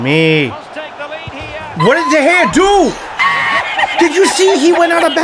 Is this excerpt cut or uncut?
uncut